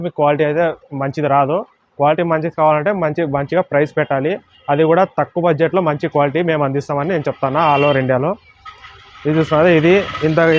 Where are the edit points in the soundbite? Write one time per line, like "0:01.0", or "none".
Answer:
none